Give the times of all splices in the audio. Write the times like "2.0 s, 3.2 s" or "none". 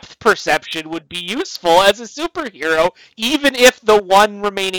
none

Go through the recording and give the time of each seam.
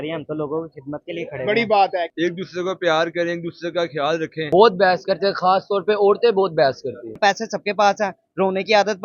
2.1 s, 4.4 s, 7.2 s

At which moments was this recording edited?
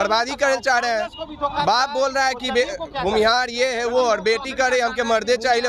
none

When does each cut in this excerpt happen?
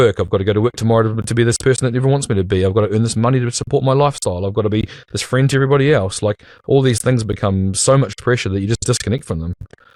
none

